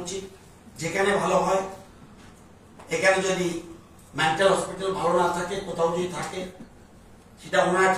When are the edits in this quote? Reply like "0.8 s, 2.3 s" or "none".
none